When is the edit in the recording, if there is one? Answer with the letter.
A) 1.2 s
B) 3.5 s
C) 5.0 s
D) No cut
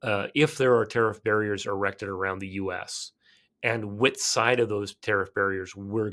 D